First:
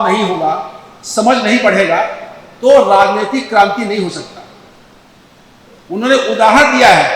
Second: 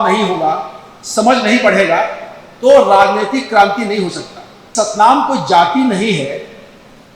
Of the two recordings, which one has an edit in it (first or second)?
second